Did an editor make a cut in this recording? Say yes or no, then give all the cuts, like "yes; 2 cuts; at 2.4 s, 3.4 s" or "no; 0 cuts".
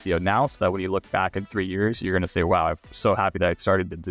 no; 0 cuts